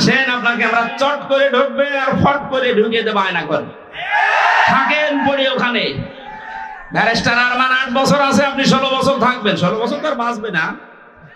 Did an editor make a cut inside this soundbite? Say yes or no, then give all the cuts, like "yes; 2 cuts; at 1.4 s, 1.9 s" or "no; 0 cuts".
no; 0 cuts